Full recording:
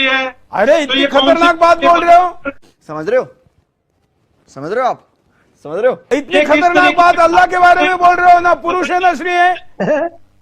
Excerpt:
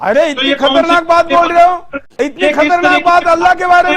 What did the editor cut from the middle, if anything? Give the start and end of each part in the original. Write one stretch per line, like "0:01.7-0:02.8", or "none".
0:02.6-0:06.0